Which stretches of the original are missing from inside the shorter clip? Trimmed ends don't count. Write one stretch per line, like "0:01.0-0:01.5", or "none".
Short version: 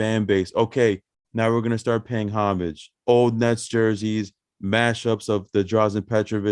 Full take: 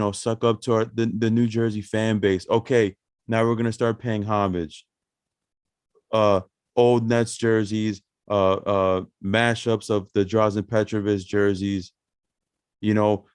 0:04.8-0:06.6
0:08.2-0:09.1